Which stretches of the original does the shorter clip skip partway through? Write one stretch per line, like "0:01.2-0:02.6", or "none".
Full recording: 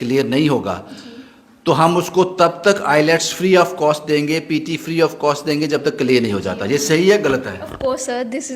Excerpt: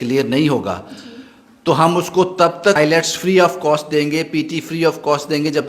0:02.8-0:02.9